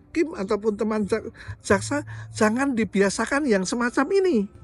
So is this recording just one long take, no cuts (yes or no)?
yes